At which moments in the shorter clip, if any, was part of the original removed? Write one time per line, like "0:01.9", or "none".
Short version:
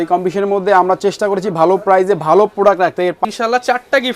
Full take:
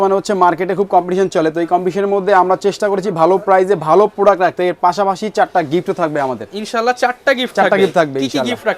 0:03.2